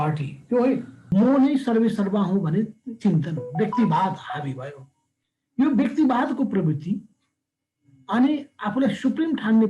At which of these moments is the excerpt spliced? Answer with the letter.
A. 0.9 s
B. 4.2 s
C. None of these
A